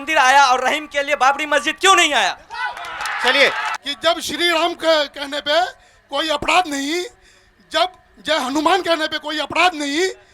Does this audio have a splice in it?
yes; 1 cut; at 3.7 s

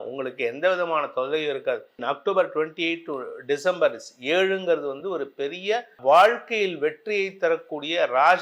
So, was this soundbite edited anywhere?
yes; 2 cuts; at 2.0 s, 5.9 s

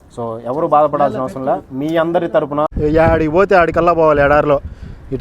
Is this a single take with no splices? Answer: no; 1 cut; at 2.7 s

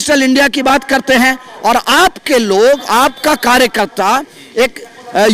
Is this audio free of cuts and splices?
yes; 0 cuts

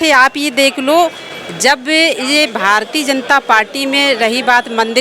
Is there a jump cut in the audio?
no; 0 cuts

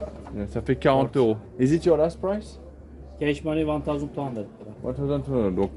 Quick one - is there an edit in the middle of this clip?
no; 0 cuts

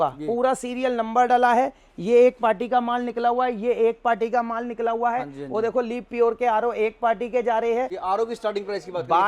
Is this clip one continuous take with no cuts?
no; 1 cut; at 8.0 s

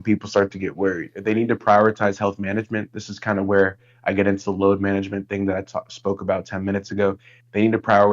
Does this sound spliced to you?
yes; 1 cut; at 1.1 s

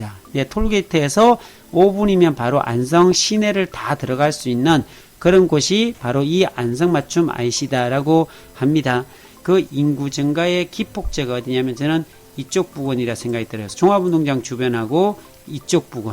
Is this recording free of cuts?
no; 1 cut; at 9.3 s

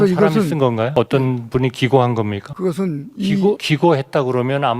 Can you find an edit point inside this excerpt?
yes; 3 cuts; at 0.9 s, 2.4 s, 3.6 s

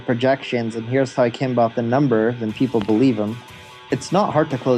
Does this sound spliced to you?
yes; 1 cut; at 3.4 s

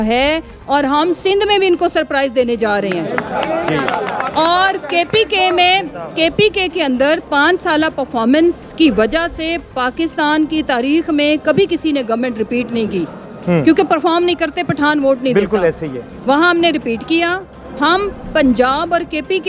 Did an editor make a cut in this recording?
no; 0 cuts

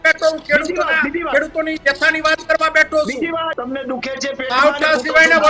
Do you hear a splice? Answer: yes; 1 cut; at 3.5 s

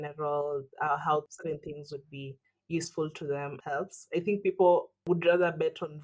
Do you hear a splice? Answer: yes; 3 cuts; at 1.3 s, 3.5 s, 5.0 s

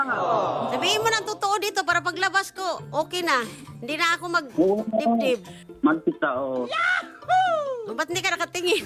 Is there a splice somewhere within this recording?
no; 0 cuts

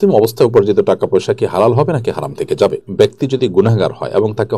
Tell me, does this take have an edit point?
yes; 1 cut; at 2.8 s

